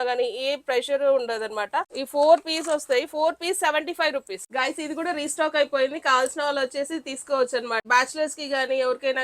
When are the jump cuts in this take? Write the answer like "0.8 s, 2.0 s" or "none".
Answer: 2.0 s, 4.4 s, 7.9 s